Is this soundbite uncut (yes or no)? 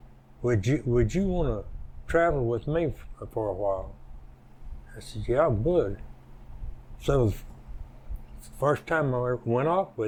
yes